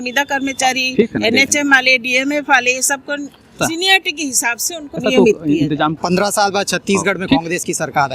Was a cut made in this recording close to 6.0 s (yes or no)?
yes